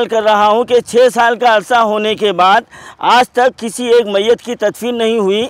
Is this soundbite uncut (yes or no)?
yes